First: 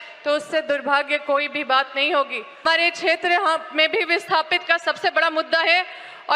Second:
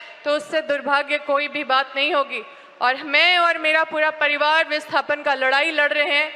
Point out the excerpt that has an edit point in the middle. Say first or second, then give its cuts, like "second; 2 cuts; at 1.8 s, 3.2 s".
first; 1 cut; at 2.6 s